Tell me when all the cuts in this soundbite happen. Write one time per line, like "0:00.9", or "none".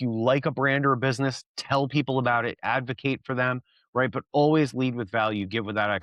none